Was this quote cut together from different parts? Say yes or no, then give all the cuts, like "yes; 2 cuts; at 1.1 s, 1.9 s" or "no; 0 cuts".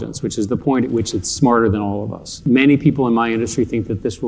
yes; 1 cut; at 2.4 s